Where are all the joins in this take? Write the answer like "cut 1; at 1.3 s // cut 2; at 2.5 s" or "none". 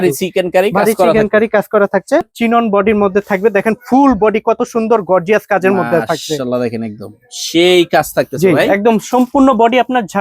cut 1; at 2.3 s